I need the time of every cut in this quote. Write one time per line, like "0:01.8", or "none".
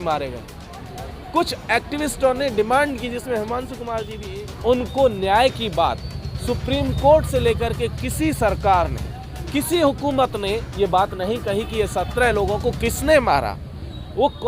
0:04.2

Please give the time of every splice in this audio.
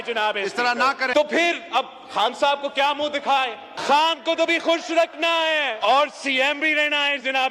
0:01.1
0:03.7
0:05.8

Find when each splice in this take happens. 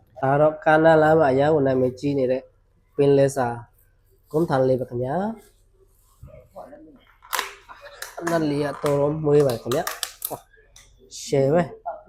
none

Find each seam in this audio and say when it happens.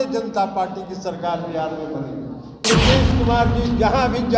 0:02.6

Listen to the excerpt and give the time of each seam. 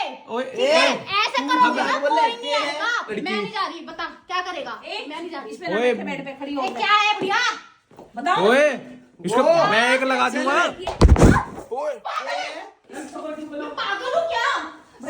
0:03.1
0:12.8

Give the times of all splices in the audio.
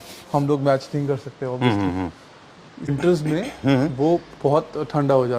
0:02.9

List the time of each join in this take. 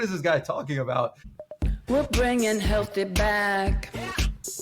0:01.3

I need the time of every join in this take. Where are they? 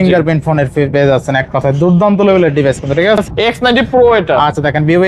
0:03.3

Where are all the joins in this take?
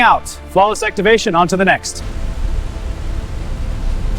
0:02.0

